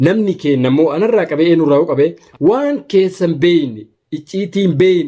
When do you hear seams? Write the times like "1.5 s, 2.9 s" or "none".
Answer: 2.2 s